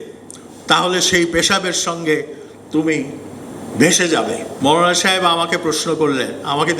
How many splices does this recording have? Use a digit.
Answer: 1